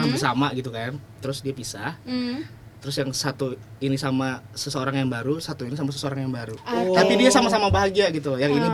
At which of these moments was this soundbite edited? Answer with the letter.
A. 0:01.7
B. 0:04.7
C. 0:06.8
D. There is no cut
D